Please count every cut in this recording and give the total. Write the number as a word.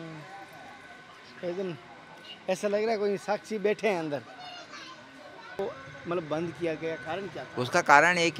one